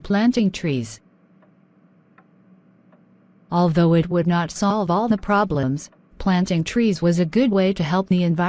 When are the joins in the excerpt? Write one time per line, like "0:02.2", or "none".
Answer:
none